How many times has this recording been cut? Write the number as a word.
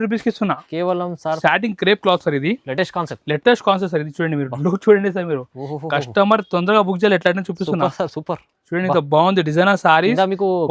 one